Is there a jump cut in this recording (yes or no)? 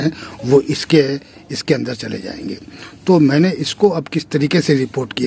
no